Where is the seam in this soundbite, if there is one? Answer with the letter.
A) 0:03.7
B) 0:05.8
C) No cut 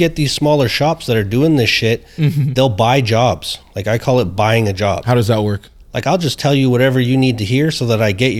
C